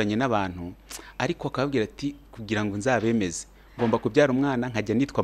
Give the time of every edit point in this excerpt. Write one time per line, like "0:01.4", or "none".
none